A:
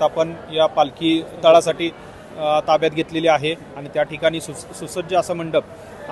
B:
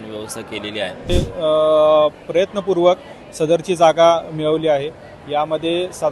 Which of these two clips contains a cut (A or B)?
B